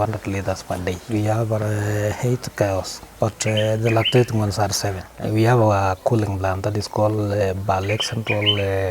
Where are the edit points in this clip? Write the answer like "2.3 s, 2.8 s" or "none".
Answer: 1.0 s, 5.1 s

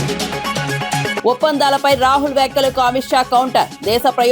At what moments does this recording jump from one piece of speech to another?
1.2 s

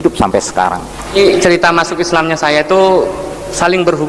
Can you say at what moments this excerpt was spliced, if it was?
1.1 s

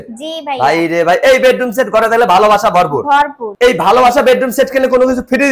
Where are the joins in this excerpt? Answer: 3.4 s

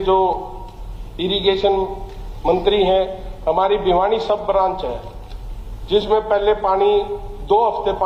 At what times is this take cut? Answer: none

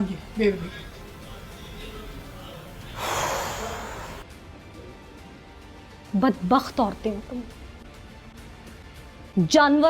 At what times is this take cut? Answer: 4.2 s

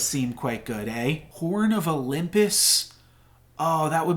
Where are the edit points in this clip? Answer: 1.3 s

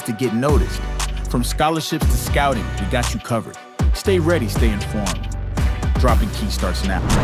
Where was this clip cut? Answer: none

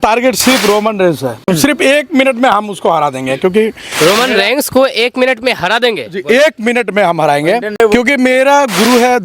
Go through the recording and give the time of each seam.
1.5 s, 7.8 s

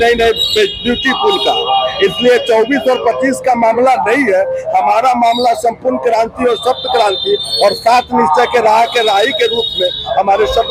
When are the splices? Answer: none

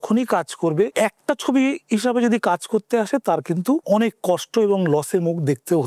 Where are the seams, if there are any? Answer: 0.9 s, 3.8 s

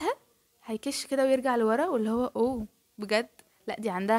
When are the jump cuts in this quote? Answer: none

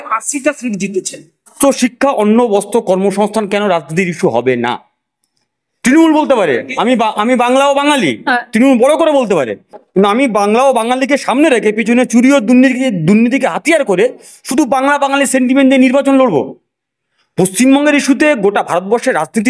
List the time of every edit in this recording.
1.5 s

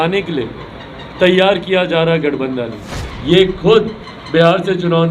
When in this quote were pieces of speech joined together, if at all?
3.0 s

